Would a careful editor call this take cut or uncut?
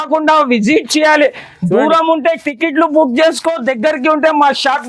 uncut